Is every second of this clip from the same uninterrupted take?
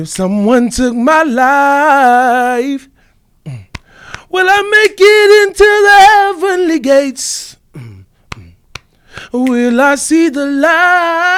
yes; 0 cuts

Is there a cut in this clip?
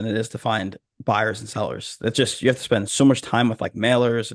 no; 0 cuts

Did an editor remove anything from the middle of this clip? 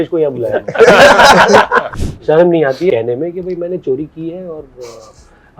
yes; 2 cuts; at 1.9 s, 2.9 s

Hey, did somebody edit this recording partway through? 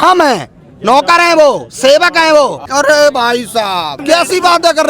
yes; 2 cuts; at 2.6 s, 4.0 s

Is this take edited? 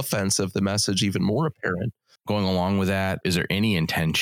yes; 2 cuts; at 2.2 s, 3.2 s

